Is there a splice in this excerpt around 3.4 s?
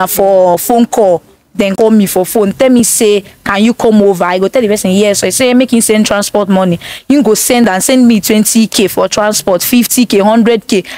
no; 1 cut; at 1.7 s

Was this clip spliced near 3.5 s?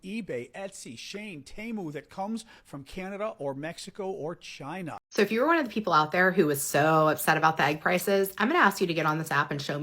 no; 1 cut; at 4.9 s

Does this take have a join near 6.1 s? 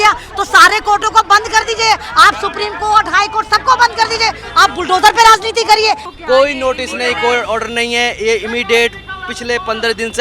yes; 1 cut; at 6.1 s

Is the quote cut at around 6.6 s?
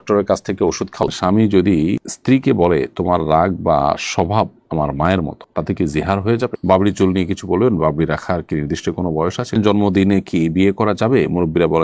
yes; 3 cuts; at 1.0 s, 6.6 s, 9.6 s

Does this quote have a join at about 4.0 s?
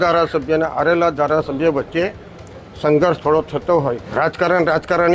yes; 1 cut; at 4.0 s

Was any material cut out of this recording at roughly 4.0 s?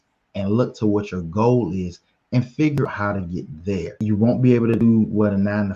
yes; 1 cut; at 4.0 s

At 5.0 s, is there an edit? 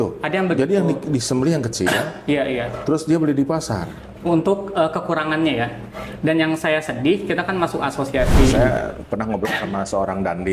no; 1 cut; at 8.6 s

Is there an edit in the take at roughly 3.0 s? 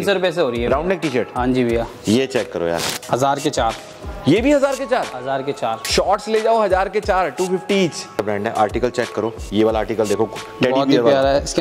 yes; 2 cuts; at 3.0 s, 8.2 s

